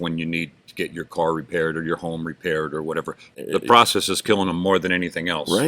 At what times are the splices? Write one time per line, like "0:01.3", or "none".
0:03.3